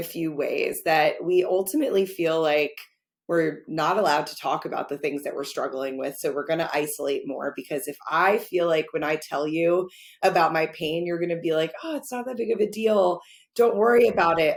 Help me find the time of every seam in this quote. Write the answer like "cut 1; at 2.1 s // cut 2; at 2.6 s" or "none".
none